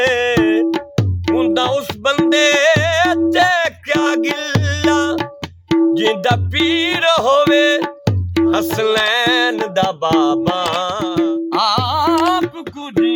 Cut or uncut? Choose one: cut